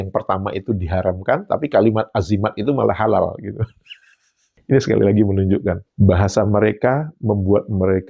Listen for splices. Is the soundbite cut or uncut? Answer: uncut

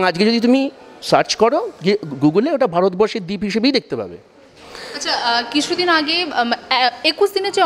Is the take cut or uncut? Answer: uncut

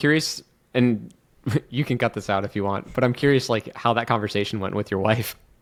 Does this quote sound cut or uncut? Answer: uncut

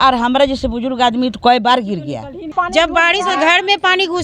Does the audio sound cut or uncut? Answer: cut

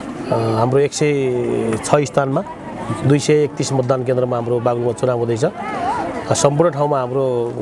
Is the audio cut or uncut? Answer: uncut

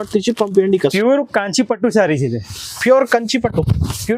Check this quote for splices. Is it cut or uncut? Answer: cut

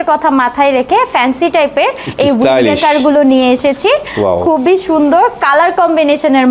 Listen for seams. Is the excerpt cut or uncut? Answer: uncut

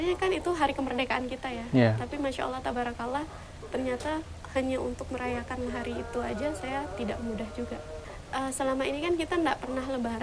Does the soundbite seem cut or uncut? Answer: cut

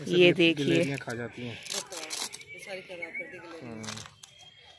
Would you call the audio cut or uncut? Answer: uncut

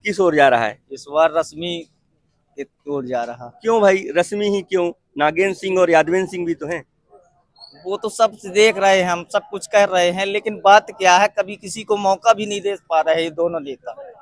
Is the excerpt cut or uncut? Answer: uncut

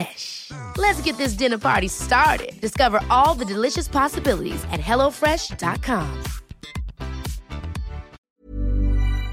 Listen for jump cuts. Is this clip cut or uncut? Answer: cut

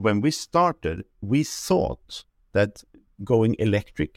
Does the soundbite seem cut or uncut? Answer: cut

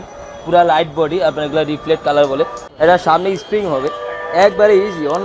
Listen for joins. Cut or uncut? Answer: cut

